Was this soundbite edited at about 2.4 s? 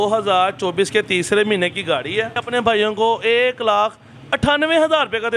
yes; 1 cut; at 2.4 s

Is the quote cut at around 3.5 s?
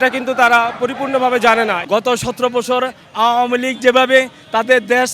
no; 1 cut; at 1.8 s

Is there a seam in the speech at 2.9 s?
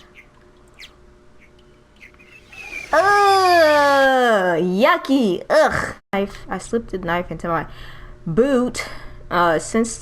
no; 1 cut; at 6.1 s

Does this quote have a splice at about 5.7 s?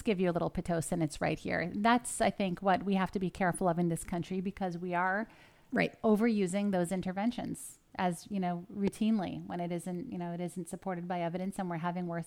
no; 0 cuts

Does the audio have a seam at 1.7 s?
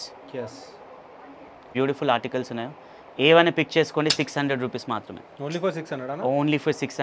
yes; 1 cut; at 1.7 s

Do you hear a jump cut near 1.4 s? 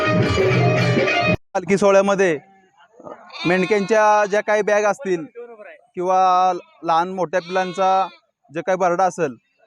yes; 1 cut; at 1.4 s

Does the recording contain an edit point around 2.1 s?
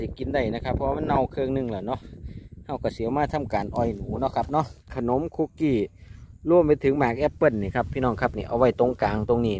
no; 1 cut; at 4.9 s

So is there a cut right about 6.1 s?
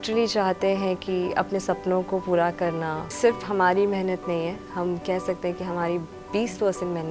no; 1 cut; at 3.1 s

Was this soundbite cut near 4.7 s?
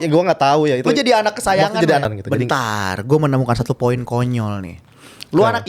no; 1 cut; at 2.1 s

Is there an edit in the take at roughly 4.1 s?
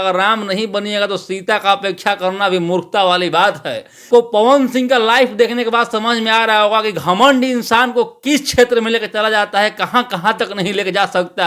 yes; 1 cut; at 4.1 s

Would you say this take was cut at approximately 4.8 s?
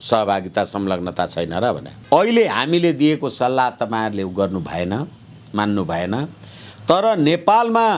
no; 1 cut; at 1.9 s

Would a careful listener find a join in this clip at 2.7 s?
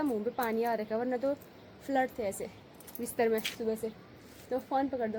no; 0 cuts

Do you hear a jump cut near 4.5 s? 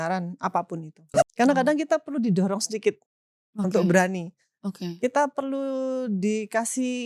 no; 1 cut; at 1.0 s

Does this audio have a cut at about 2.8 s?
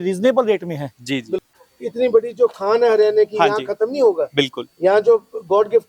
no; 1 cut; at 1.5 s

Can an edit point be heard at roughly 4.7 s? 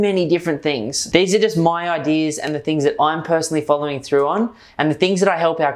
no; 1 cut; at 0.9 s

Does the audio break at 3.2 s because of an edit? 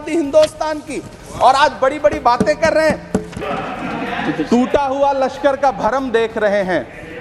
yes; 1 cut; at 3.2 s

